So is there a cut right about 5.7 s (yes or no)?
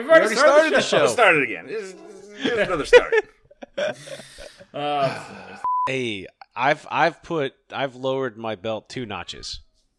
yes